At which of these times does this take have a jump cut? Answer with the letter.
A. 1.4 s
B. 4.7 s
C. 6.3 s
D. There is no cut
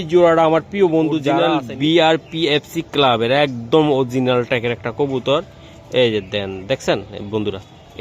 A